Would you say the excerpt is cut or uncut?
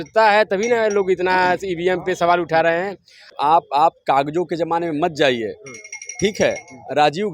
cut